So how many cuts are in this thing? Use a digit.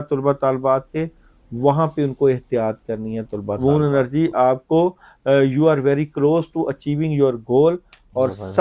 1